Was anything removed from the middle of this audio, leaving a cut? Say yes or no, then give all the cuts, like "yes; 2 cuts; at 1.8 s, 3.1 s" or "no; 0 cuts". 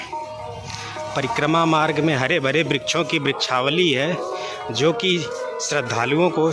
no; 0 cuts